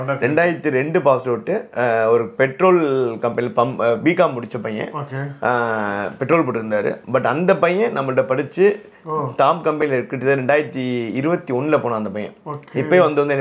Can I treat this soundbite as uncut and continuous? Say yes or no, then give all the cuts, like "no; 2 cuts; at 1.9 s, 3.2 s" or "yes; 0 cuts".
yes; 0 cuts